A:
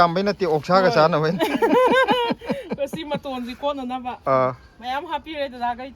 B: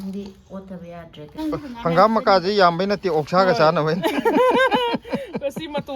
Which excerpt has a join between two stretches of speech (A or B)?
B